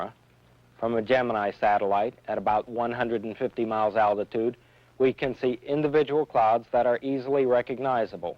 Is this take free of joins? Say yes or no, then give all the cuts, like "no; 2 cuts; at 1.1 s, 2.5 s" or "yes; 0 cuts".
no; 1 cut; at 6.3 s